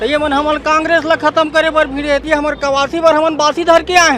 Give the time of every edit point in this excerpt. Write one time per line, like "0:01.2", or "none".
0:02.2